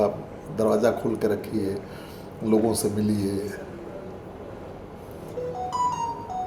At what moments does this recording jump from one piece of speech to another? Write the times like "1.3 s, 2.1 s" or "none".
none